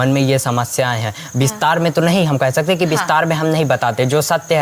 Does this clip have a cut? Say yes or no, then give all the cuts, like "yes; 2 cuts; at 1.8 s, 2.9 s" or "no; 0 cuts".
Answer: no; 0 cuts